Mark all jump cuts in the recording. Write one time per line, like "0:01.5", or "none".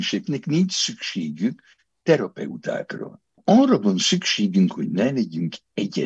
0:03.4
0:05.0